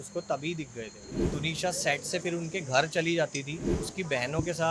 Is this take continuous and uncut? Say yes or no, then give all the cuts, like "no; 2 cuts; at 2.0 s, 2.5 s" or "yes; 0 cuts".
no; 2 cuts; at 1.1 s, 3.8 s